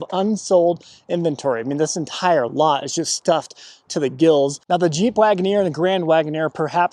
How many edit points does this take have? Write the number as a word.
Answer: one